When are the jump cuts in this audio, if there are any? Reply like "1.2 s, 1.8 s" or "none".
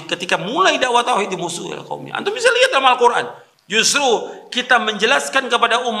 3.4 s